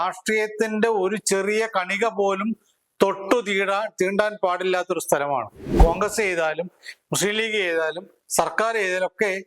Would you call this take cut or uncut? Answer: cut